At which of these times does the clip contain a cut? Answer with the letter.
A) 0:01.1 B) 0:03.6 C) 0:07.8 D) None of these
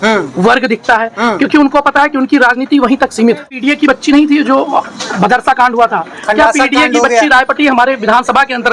B